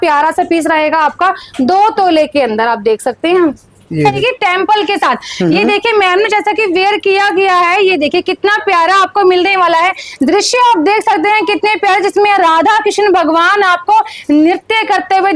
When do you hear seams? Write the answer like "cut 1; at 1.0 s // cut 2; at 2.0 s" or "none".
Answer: cut 1; at 4.2 s

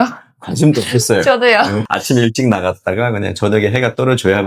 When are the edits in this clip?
cut 1; at 1.8 s

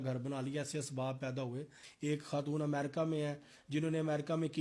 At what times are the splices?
cut 1; at 1.8 s

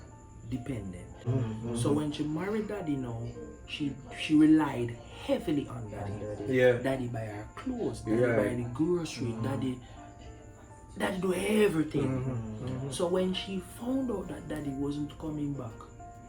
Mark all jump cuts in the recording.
cut 1; at 1.3 s

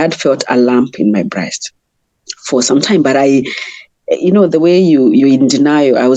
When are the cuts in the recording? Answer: none

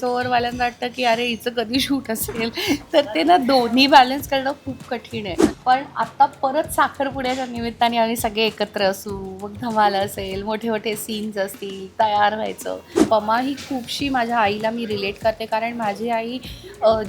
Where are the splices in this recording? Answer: cut 1; at 5.5 s // cut 2; at 13.0 s

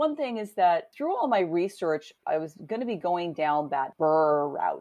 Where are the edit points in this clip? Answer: cut 1; at 0.9 s // cut 2; at 2.1 s // cut 3; at 3.9 s

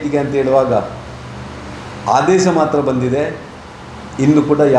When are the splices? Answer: none

